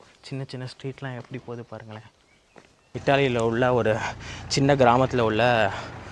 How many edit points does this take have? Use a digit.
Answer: 1